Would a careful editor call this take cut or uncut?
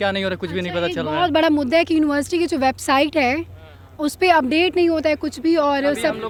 uncut